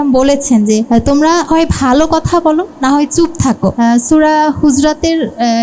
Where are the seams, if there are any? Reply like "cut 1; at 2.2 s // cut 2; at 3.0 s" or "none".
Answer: cut 1; at 1.2 s // cut 2; at 3.7 s